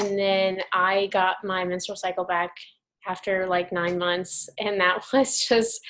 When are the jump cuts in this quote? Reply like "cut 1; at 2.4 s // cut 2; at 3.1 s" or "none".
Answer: none